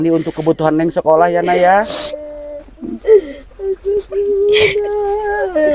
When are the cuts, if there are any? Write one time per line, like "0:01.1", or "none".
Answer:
none